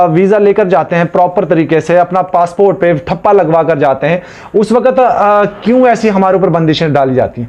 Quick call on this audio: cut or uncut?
uncut